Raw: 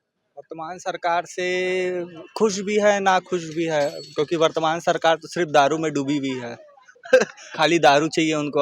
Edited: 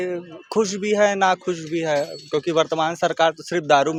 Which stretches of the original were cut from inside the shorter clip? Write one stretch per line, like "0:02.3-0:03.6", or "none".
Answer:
none